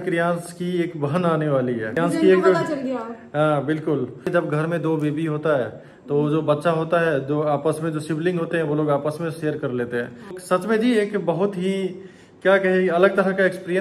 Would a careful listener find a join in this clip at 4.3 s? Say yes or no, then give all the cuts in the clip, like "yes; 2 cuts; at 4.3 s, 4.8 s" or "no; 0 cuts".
yes; 3 cuts; at 2.0 s, 4.3 s, 10.3 s